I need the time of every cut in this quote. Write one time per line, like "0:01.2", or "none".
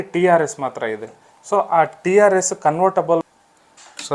0:03.2